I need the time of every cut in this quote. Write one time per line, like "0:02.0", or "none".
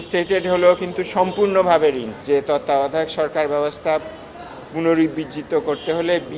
0:02.1

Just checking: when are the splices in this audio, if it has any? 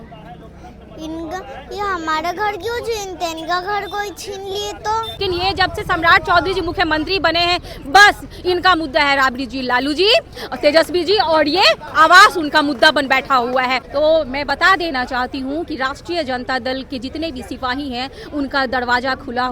0:05.2
0:13.8

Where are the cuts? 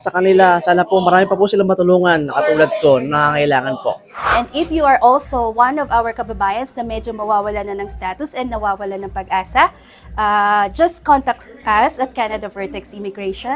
0:04.2

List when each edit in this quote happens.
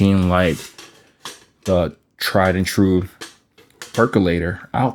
none

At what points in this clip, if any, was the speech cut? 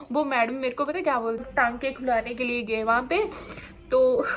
0:01.5

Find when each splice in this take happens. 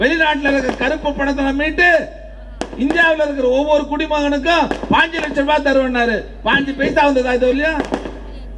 none

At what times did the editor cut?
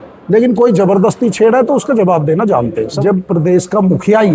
0:02.9

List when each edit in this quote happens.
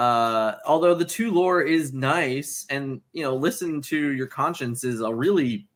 none

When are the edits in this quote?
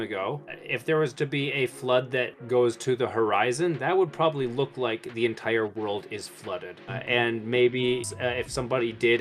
0:02.3
0:08.1

